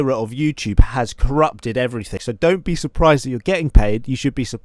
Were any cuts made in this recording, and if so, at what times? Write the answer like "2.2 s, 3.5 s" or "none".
2.1 s